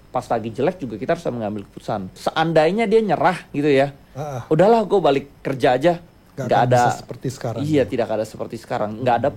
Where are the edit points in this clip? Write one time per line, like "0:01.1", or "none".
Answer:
0:02.2